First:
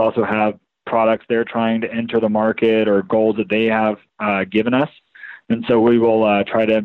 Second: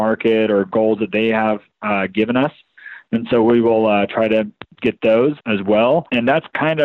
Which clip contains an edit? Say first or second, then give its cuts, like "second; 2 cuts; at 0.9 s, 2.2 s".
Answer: second; 2 cuts; at 5.4 s, 6.1 s